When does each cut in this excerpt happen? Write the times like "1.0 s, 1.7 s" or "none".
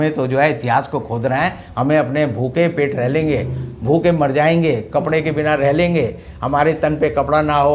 none